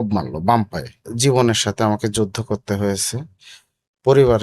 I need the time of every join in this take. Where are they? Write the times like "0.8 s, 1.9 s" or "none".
1.0 s

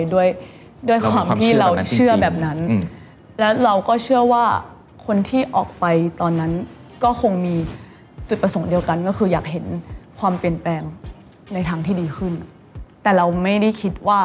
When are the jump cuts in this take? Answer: none

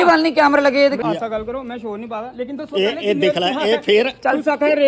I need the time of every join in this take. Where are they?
1.0 s

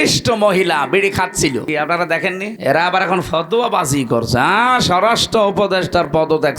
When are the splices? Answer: 1.6 s, 2.6 s

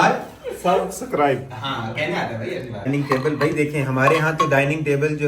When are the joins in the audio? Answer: 2.9 s

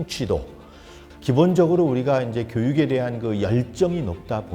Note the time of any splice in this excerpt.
1.1 s

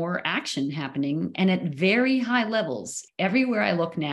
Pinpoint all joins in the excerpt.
2.9 s

